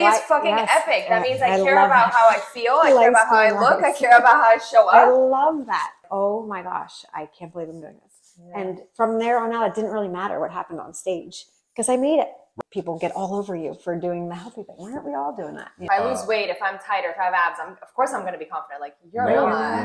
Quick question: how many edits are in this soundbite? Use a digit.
3